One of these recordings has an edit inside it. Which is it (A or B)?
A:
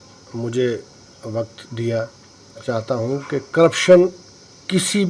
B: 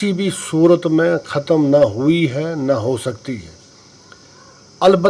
A